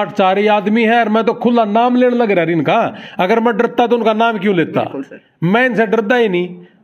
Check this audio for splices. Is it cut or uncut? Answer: uncut